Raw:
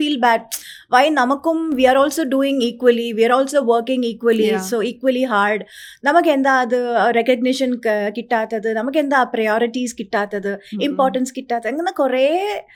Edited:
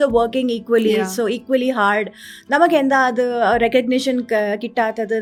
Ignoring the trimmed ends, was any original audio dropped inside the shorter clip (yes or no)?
no